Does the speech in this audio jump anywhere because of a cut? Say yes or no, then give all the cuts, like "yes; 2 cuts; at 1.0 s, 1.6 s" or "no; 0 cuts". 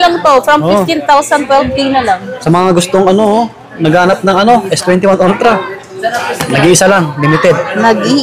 no; 0 cuts